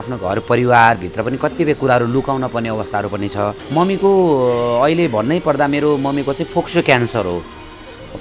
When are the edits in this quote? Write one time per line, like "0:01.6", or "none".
0:03.6